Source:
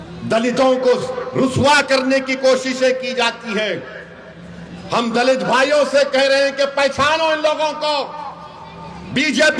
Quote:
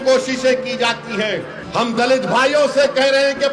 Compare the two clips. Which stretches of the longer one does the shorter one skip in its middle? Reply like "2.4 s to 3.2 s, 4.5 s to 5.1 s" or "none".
3.9 s to 4.7 s